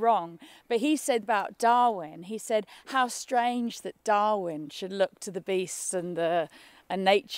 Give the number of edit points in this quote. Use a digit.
1